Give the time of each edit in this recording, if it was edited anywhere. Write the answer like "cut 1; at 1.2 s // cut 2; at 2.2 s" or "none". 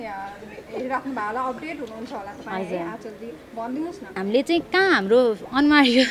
cut 1; at 4.2 s